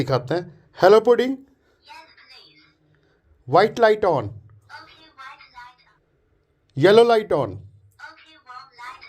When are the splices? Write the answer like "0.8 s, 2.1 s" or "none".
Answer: 5.8 s